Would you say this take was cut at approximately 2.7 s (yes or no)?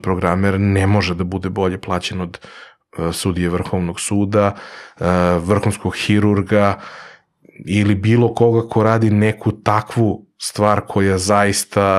no